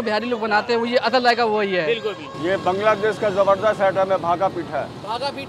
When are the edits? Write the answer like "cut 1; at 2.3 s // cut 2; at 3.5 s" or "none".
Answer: cut 1; at 2.3 s